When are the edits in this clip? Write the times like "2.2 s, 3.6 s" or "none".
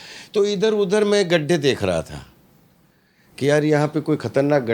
none